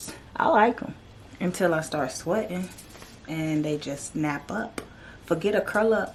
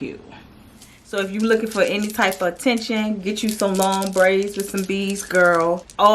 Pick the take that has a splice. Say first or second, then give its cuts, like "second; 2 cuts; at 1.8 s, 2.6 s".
second; 1 cut; at 1.0 s